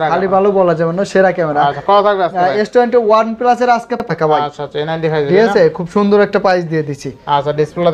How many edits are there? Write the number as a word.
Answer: one